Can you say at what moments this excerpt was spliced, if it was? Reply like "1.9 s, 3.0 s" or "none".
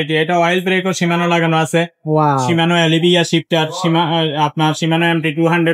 none